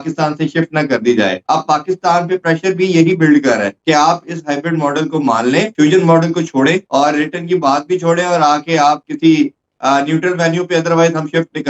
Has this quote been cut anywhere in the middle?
no; 0 cuts

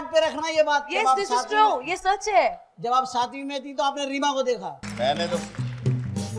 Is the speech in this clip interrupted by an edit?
yes; 1 cut; at 4.8 s

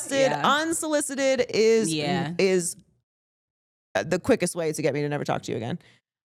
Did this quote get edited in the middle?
no; 0 cuts

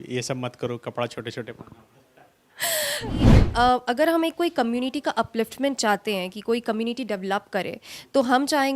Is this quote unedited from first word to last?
no; 1 cut; at 3.3 s

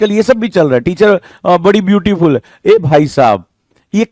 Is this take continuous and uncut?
yes; 0 cuts

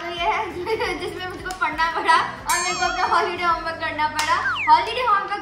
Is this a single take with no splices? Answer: yes; 0 cuts

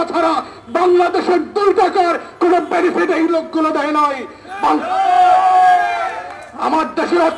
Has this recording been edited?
no; 0 cuts

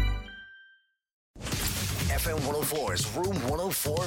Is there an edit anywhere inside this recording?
yes; 1 cut; at 1.4 s

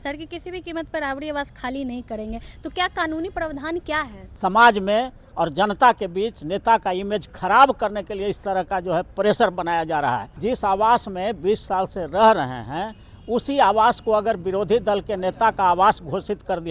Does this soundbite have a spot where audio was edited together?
yes; 2 cuts; at 4.2 s, 10.3 s

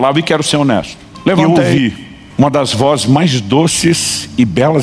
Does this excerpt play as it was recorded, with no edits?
no; 1 cut; at 1.0 s

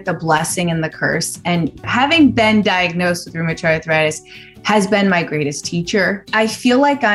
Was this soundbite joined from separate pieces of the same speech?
yes; 2 cuts; at 1.8 s, 6.3 s

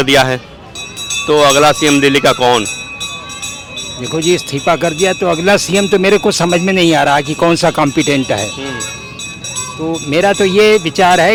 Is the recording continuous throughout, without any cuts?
yes; 0 cuts

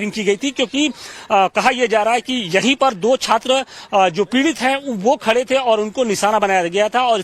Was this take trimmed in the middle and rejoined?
no; 0 cuts

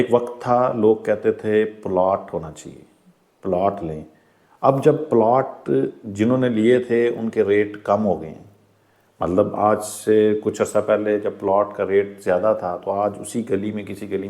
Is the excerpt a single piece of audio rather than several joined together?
yes; 0 cuts

